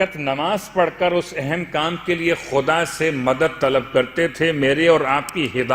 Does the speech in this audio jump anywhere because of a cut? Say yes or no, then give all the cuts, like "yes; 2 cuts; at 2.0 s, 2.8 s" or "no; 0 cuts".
no; 0 cuts